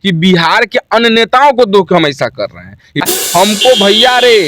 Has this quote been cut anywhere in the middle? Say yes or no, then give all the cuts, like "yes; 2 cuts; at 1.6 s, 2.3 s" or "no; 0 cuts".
yes; 1 cut; at 3.0 s